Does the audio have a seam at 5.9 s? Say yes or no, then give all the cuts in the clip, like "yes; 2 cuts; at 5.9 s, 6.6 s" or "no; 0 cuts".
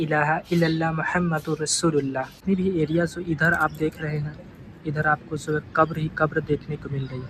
no; 1 cut; at 2.3 s